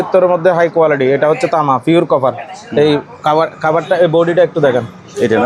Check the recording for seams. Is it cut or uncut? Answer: uncut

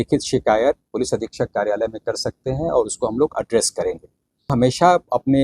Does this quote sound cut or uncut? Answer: cut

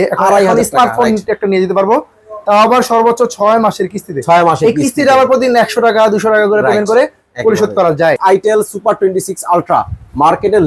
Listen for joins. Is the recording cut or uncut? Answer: cut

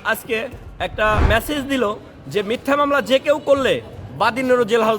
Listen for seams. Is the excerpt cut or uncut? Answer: cut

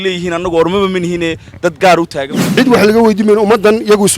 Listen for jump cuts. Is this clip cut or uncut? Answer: cut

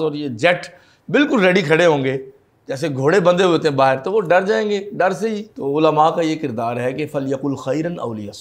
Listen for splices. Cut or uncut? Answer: cut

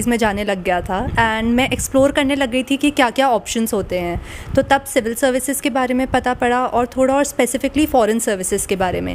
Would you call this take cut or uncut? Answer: uncut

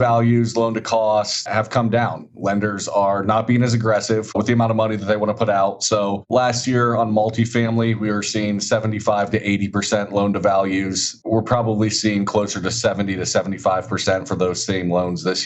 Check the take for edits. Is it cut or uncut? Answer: cut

